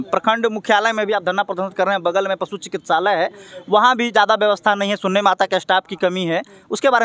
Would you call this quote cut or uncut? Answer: uncut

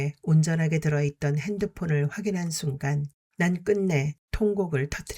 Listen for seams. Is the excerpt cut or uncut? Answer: cut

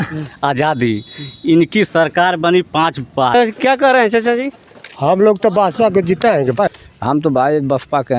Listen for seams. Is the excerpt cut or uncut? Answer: cut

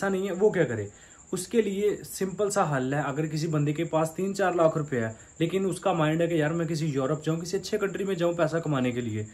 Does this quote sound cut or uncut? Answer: uncut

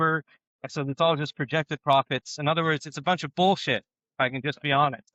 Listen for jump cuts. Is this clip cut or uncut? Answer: uncut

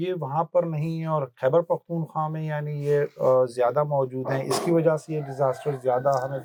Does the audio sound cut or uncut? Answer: uncut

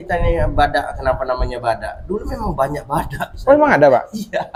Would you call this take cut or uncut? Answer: uncut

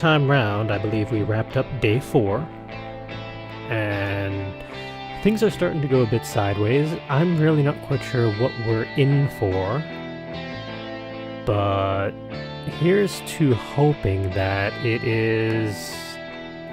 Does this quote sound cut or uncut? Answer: cut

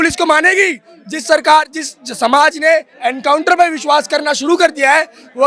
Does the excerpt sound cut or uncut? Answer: uncut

